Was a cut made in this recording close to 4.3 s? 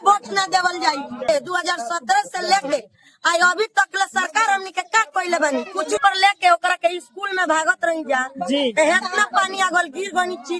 no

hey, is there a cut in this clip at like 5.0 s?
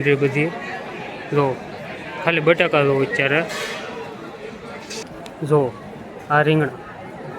yes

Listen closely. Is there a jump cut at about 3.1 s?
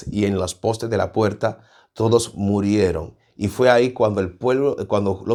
no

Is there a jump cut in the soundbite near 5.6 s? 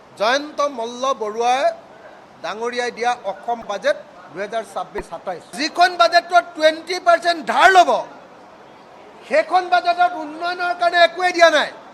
yes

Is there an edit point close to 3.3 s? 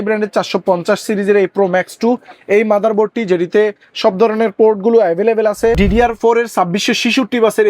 no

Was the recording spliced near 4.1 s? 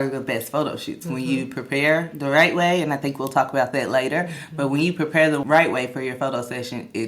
no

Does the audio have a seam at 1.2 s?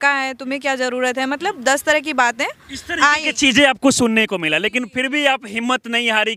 no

